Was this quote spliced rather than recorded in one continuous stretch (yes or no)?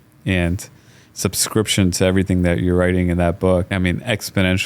yes